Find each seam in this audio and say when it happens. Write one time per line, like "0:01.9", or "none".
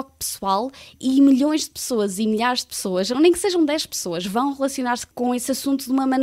0:05.0